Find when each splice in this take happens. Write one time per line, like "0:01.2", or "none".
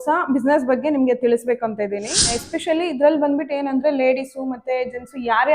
0:02.3